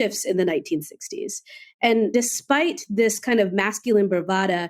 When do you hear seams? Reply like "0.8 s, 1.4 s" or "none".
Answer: 2.1 s